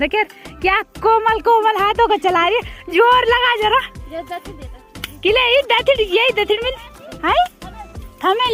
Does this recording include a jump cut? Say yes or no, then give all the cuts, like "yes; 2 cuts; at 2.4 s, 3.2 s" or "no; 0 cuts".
no; 0 cuts